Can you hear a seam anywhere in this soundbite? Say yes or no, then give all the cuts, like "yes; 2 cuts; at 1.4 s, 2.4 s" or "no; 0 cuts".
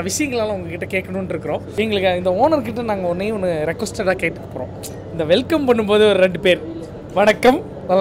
yes; 1 cut; at 1.7 s